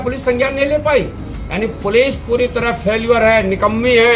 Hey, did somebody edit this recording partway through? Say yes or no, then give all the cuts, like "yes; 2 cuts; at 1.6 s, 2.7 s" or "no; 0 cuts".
no; 0 cuts